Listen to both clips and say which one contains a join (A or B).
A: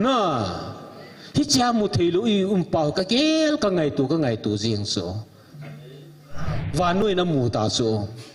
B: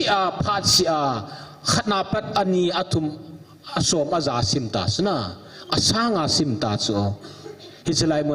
A